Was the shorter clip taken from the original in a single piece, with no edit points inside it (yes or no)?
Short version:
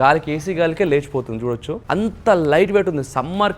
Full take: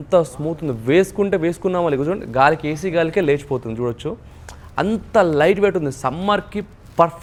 no